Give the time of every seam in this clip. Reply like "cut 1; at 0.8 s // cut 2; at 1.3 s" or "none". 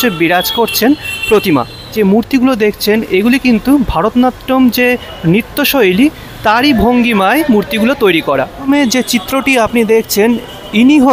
cut 1; at 1.9 s // cut 2; at 8.7 s